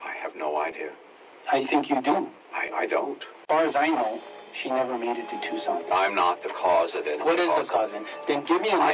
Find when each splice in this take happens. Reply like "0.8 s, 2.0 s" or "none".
none